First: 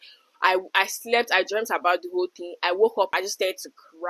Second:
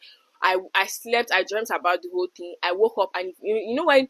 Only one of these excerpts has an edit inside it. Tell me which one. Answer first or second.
first